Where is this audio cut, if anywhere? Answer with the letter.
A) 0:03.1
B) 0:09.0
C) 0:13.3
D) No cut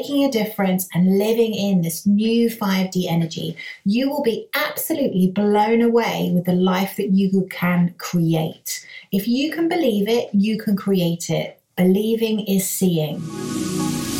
C